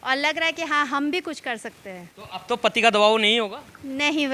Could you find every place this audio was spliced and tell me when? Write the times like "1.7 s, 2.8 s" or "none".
none